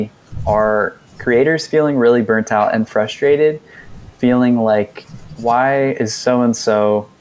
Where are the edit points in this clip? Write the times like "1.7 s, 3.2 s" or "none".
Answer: none